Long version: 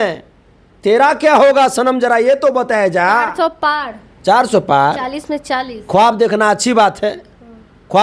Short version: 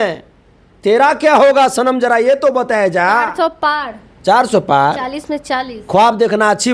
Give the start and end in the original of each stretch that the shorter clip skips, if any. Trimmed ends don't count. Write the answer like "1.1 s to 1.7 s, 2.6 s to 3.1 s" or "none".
none